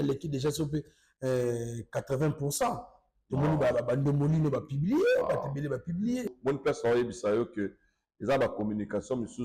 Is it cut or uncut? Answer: cut